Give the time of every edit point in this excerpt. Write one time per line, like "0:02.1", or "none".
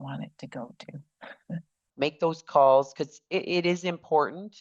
0:01.8